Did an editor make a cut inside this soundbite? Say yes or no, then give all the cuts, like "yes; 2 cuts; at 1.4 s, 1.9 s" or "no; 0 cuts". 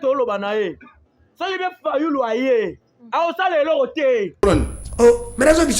yes; 1 cut; at 4.4 s